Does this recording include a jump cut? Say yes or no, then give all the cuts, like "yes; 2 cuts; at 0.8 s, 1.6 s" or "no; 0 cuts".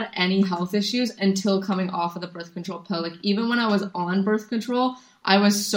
no; 0 cuts